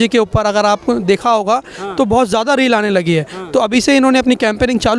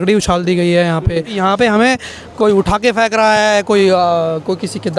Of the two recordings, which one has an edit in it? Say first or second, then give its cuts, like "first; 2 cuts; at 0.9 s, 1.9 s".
second; 1 cut; at 1.3 s